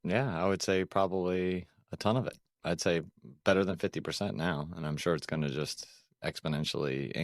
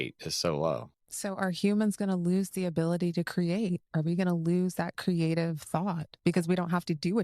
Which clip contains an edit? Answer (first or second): second